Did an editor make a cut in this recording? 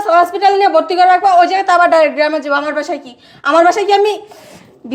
no; 0 cuts

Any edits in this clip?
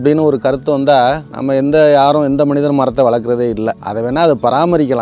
yes; 2 cuts; at 1.3 s, 3.8 s

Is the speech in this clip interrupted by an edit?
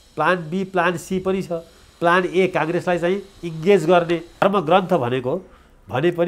yes; 1 cut; at 4.4 s

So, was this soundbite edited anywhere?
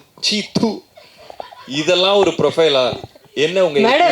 no; 0 cuts

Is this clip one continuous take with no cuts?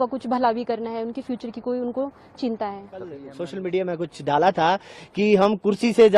no; 1 cut; at 3.4 s

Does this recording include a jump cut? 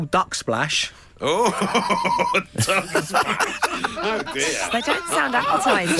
no; 0 cuts

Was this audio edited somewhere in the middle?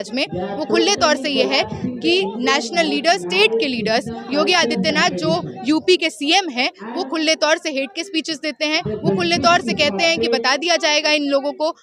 no; 0 cuts

